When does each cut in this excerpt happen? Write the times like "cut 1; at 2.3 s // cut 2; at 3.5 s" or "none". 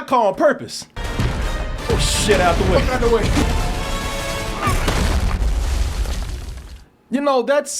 cut 1; at 3.4 s